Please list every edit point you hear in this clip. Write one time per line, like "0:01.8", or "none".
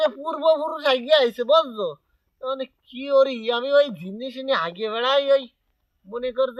none